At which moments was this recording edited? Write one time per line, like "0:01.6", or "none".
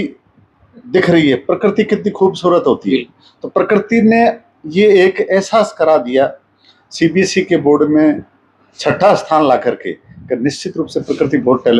none